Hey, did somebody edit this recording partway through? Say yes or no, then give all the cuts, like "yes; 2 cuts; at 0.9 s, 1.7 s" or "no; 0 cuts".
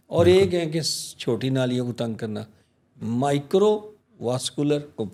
no; 0 cuts